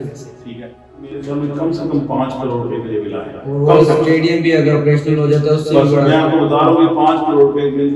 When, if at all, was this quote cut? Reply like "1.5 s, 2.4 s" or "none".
1.1 s